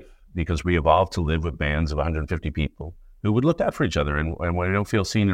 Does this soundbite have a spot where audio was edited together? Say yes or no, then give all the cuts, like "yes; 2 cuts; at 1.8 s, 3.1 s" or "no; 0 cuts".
no; 0 cuts